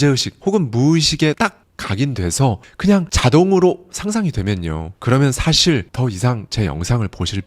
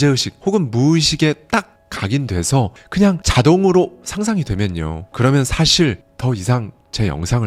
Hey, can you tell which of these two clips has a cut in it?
first; 2 cuts; at 1.4 s, 6.2 s

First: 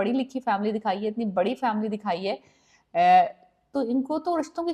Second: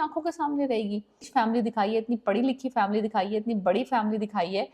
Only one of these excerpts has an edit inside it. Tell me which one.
second; 1 cut; at 1.3 s

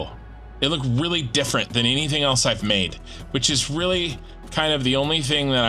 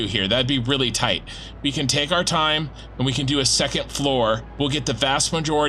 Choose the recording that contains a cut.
second; 1 cut; at 4.5 s

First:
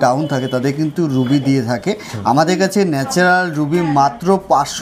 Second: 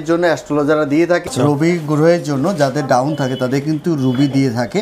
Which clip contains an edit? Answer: second; 1 cut; at 1.2 s

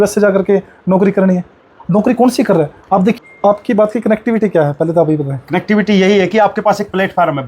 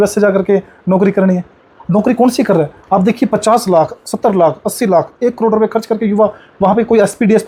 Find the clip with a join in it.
first; 1 cut; at 3.2 s

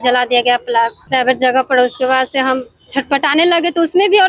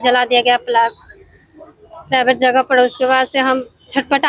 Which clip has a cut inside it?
first; 1 cut; at 1.0 s

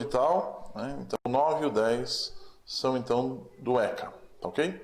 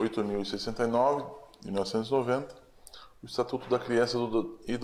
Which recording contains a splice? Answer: first; 1 cut; at 1.2 s

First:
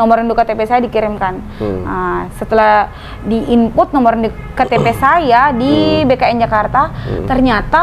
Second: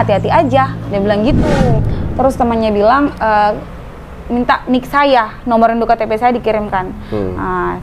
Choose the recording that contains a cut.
second; 1 cut; at 1.6 s

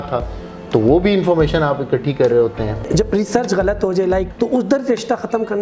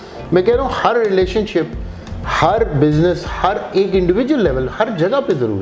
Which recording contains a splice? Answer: first; 2 cuts; at 2.8 s, 4.3 s

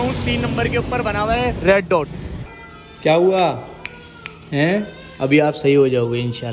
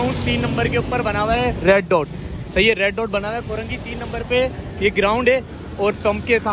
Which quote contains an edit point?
first; 1 cut; at 2.4 s

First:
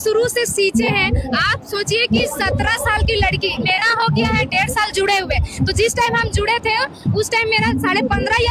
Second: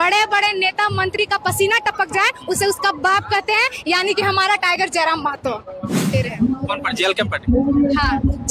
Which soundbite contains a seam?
second; 1 cut; at 6.1 s

